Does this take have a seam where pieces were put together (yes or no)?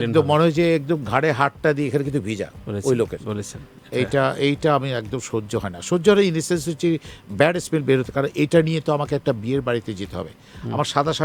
no